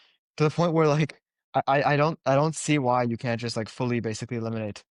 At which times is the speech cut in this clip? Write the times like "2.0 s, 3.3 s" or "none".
none